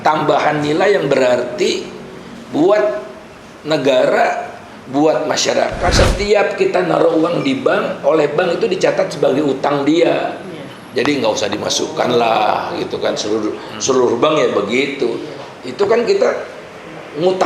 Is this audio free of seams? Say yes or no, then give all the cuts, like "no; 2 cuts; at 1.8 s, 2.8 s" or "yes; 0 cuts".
no; 1 cut; at 5.9 s